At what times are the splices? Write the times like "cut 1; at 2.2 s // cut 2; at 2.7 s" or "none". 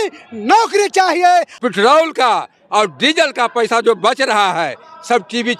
cut 1; at 1.5 s

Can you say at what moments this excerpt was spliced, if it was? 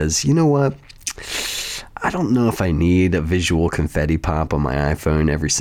none

